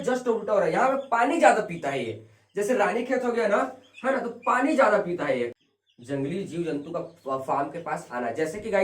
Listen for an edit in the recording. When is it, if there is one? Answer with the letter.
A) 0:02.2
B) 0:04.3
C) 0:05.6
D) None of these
C